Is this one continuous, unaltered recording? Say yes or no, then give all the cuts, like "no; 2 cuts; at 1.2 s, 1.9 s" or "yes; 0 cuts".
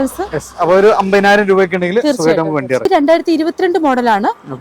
no; 1 cut; at 2.8 s